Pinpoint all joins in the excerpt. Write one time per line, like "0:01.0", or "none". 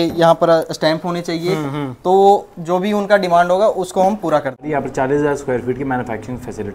0:04.7